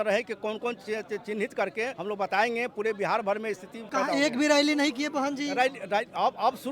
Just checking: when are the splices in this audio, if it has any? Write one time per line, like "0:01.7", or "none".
0:02.0
0:03.9